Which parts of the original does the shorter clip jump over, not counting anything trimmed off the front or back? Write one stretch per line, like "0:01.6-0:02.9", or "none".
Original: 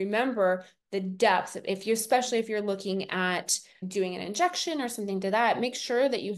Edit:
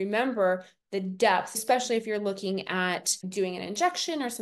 0:01.6-0:02.0
0:03.6-0:03.7